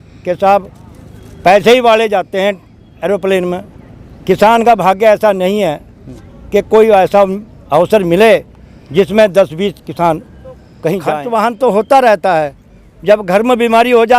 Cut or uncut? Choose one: cut